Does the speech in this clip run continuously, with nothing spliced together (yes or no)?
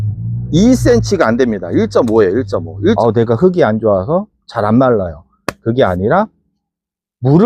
no